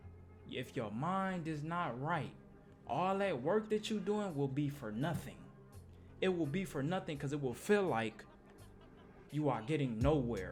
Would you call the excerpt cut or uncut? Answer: uncut